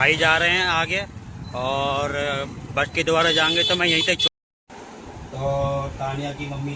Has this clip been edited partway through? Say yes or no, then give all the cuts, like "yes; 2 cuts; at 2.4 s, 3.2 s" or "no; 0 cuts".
yes; 1 cut; at 4.2 s